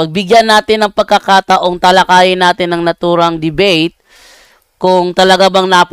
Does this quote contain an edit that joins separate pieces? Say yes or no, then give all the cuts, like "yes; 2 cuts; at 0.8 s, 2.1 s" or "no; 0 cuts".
no; 0 cuts